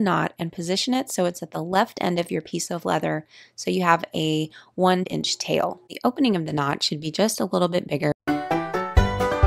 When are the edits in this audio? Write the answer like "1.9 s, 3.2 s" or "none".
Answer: none